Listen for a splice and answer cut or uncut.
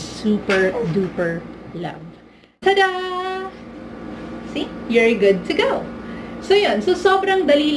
cut